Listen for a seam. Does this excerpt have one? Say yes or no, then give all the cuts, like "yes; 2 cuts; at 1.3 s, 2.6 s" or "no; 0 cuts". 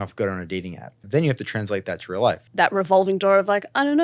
yes; 2 cuts; at 1.0 s, 2.5 s